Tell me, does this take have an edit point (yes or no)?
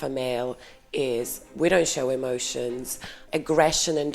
yes